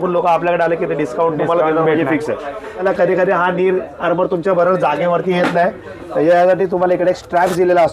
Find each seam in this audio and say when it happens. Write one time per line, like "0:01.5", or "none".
0:02.8